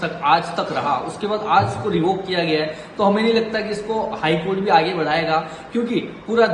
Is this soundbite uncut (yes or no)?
yes